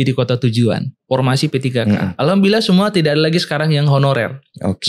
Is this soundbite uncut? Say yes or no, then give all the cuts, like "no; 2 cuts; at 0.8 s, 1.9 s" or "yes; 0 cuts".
no; 1 cut; at 0.9 s